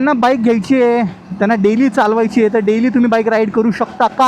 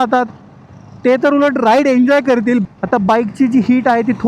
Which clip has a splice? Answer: second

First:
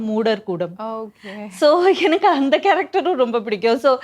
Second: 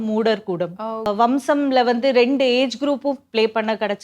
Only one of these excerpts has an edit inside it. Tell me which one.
second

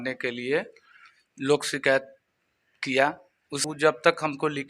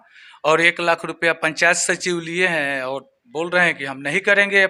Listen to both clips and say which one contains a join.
first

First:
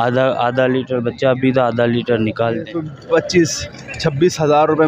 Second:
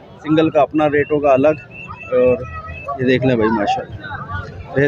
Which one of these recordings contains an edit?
first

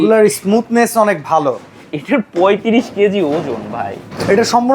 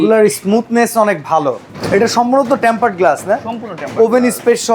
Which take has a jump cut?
second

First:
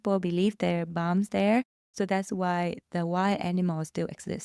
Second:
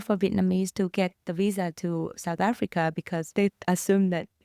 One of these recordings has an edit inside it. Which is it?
second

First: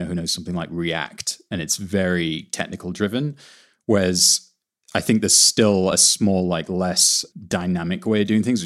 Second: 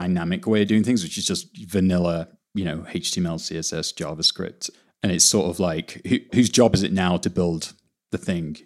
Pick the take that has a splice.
second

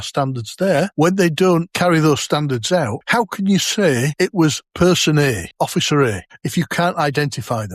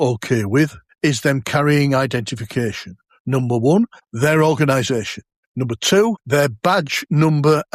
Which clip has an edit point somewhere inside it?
first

